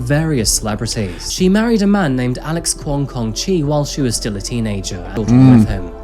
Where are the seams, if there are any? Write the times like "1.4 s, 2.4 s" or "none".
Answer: 1.2 s, 5.1 s